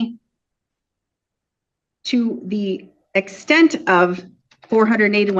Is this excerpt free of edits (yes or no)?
yes